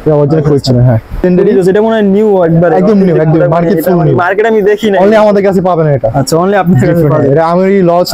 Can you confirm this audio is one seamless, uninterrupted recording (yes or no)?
no